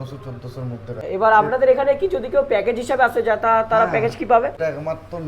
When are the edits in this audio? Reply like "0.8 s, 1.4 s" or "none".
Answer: 1.0 s, 4.6 s